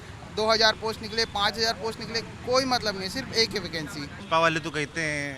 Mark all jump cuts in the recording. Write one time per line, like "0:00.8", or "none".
0:04.2